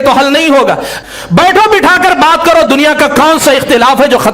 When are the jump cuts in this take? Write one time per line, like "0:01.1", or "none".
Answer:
0:00.9